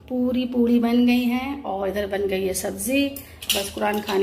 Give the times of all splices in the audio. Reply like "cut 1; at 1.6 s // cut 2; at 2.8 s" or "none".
none